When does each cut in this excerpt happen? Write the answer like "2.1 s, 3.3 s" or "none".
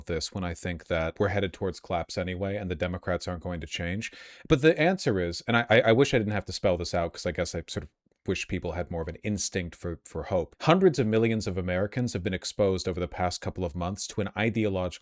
1.1 s, 10.5 s